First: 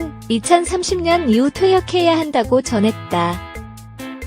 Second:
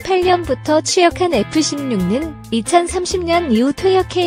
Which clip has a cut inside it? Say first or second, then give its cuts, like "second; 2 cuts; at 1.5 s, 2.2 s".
first; 1 cut; at 3.4 s